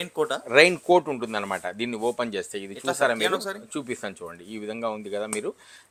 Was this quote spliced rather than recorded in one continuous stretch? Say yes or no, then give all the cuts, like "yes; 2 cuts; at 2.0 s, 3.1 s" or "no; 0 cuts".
no; 0 cuts